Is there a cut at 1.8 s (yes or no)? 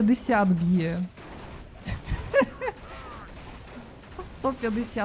no